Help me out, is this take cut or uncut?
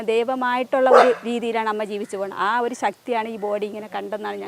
uncut